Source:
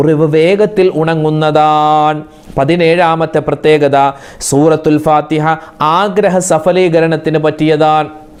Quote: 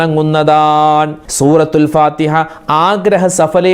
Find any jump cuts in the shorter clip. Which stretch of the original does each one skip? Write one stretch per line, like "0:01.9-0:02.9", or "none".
0:02.3-0:04.3